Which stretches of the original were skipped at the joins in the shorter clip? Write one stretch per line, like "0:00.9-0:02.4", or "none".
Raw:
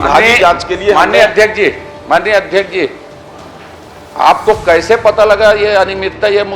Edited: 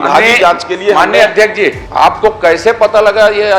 0:01.8-0:04.1